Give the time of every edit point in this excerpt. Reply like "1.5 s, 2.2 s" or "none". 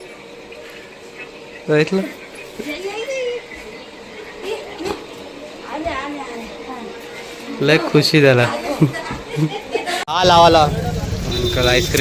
10.0 s